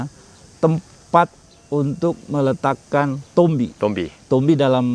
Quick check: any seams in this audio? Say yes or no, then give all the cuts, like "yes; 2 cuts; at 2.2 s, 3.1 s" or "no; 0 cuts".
no; 0 cuts